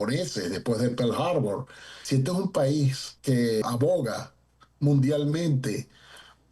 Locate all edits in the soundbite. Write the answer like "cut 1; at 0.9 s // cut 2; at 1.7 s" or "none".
cut 1; at 2.0 s // cut 2; at 3.6 s